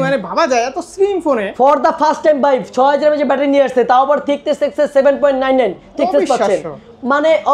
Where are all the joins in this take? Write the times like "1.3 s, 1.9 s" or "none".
none